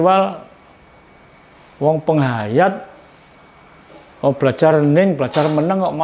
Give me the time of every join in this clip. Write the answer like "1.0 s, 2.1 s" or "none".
none